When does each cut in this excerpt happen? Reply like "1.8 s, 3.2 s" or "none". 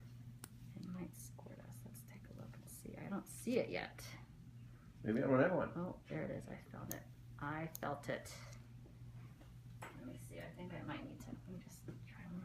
none